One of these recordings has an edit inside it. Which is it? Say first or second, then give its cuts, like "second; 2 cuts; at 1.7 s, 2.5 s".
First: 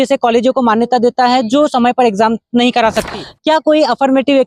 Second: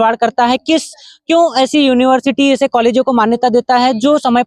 first; 1 cut; at 3.1 s